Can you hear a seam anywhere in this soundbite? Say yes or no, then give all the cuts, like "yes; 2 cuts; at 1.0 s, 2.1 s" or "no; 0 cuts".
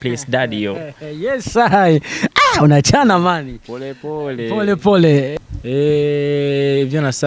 yes; 1 cut; at 5.3 s